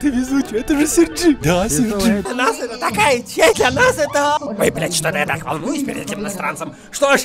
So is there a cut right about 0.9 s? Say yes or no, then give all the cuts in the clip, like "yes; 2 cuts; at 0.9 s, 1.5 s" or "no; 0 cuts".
no; 3 cuts; at 2.2 s, 3.6 s, 4.5 s